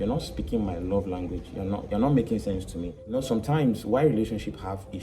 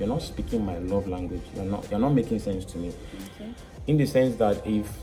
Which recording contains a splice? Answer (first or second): first